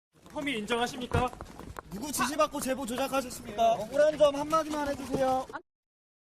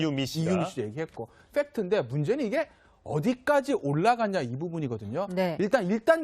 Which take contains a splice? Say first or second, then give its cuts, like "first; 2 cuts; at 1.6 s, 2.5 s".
second; 1 cut; at 3.1 s